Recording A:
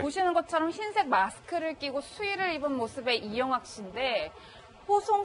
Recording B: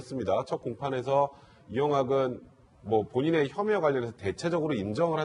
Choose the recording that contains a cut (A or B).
B